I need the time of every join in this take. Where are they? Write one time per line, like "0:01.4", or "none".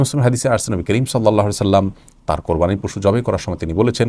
none